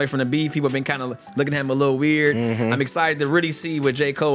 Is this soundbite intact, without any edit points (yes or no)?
yes